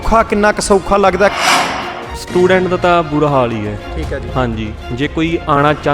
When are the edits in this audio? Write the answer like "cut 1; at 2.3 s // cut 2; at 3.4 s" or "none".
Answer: cut 1; at 1.7 s